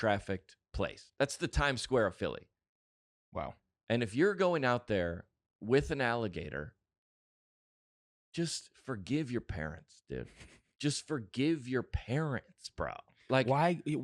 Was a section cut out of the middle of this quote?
no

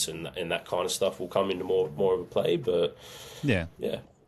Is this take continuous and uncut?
yes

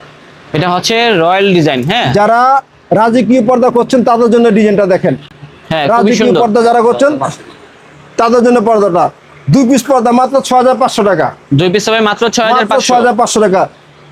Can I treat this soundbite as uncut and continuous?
yes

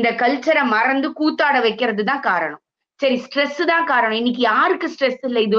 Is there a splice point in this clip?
no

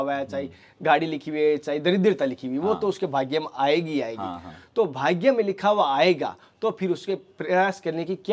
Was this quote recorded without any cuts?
yes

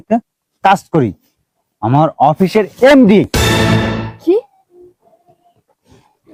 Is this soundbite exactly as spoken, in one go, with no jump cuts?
yes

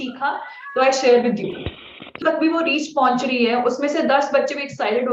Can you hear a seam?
yes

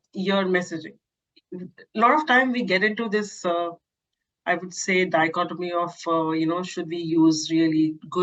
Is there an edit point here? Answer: no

